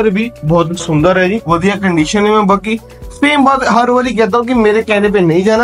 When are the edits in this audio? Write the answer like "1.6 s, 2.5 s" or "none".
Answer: 1.4 s